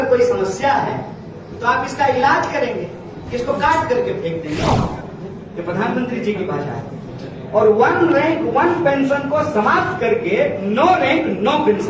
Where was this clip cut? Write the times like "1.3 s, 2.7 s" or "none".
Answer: 5.0 s